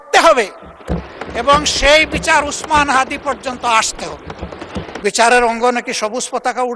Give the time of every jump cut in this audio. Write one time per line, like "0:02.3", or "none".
0:04.9